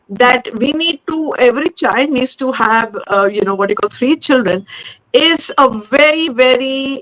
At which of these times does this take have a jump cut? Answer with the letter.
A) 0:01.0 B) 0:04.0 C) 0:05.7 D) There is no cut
D